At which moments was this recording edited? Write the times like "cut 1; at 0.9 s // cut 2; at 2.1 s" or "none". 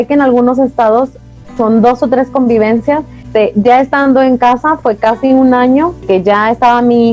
cut 1; at 3.2 s // cut 2; at 6.0 s